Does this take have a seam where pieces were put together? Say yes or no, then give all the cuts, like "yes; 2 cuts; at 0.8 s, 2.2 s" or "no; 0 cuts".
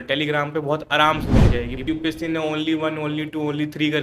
yes; 1 cut; at 1.8 s